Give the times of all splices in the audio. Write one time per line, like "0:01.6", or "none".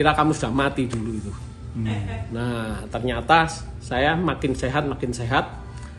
none